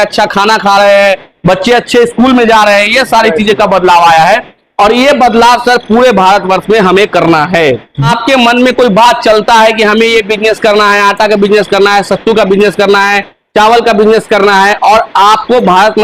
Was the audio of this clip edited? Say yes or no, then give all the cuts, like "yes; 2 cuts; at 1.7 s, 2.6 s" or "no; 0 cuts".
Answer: yes; 1 cut; at 8.1 s